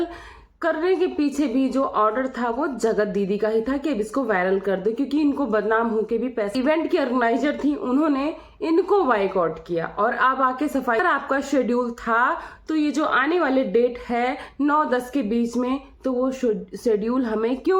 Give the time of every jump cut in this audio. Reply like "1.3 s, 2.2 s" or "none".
6.5 s, 11.0 s